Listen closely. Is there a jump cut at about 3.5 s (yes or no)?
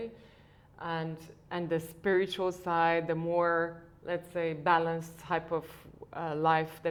no